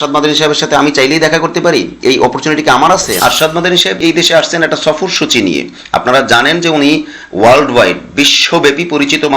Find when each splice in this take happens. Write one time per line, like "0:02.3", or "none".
0:03.2